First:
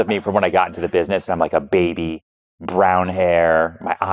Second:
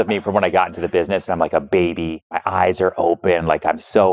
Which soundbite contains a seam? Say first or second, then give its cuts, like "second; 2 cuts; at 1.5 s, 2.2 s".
second; 1 cut; at 2.3 s